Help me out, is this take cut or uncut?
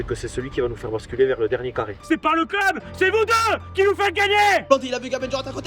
cut